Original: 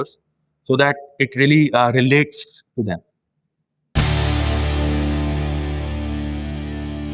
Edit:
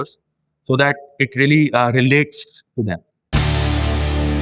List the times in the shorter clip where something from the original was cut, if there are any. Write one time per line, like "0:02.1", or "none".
0:03.1